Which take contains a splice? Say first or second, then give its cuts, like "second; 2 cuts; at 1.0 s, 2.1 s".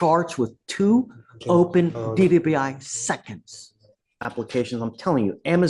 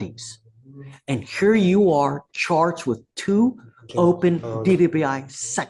first; 1 cut; at 4.5 s